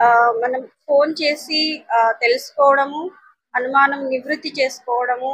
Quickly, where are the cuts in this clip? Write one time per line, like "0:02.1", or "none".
none